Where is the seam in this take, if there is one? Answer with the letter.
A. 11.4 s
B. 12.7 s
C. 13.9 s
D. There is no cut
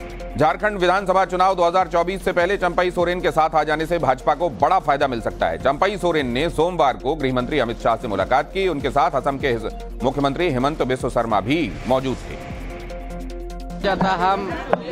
D